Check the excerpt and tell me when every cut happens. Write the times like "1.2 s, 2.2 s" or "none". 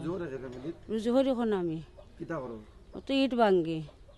none